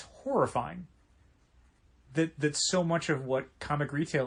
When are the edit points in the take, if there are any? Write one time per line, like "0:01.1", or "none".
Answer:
none